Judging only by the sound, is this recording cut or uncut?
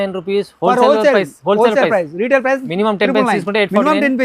uncut